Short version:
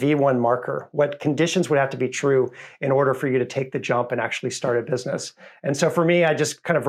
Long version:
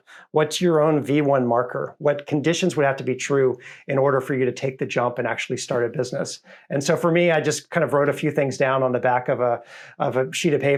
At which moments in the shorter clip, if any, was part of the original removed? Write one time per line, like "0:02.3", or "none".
none